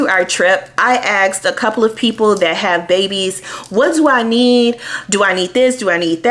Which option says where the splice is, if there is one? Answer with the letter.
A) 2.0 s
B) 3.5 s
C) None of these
B